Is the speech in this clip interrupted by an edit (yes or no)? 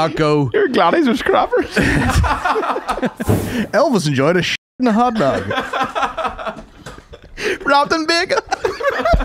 yes